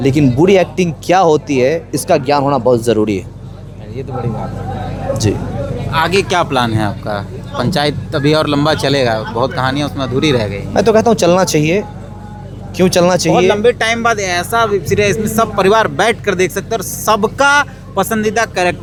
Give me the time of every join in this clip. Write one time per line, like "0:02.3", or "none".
none